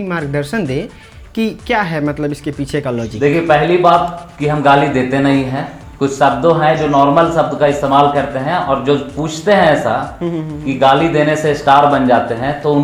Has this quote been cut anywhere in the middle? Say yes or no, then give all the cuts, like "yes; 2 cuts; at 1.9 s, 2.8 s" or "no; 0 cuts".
no; 0 cuts